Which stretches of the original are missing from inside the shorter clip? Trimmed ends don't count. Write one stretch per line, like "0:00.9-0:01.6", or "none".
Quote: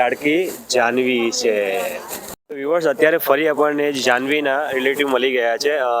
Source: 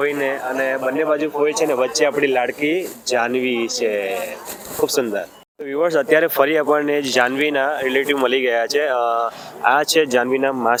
0:04.6-0:05.4